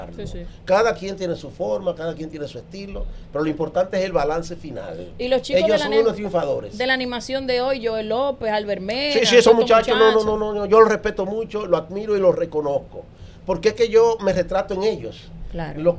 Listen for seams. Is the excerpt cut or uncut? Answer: uncut